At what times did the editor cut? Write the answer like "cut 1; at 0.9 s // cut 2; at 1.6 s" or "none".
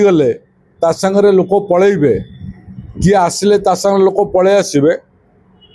none